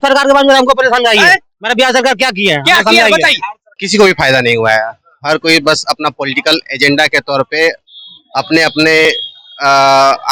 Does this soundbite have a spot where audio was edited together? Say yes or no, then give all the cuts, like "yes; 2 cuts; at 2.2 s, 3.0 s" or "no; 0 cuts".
yes; 1 cut; at 3.8 s